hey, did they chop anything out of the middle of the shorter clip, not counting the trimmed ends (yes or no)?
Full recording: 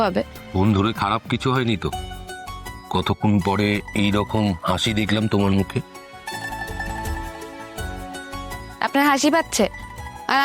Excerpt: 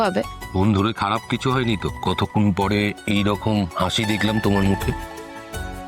yes